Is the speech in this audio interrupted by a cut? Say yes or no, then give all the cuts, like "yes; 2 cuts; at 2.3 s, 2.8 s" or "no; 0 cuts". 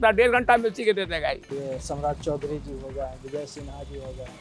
yes; 1 cut; at 1.5 s